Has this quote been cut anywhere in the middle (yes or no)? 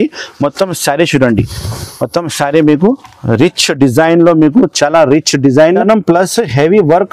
yes